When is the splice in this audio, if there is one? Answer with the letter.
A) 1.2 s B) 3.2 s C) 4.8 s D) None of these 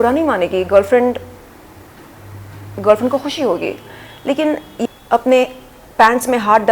C